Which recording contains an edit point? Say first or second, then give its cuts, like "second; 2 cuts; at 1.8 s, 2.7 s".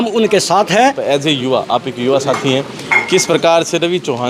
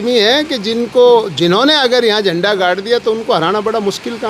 first; 1 cut; at 1.0 s